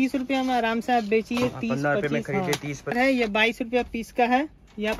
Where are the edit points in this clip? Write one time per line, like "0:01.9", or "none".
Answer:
0:02.9